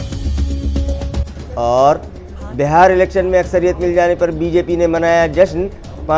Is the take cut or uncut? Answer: uncut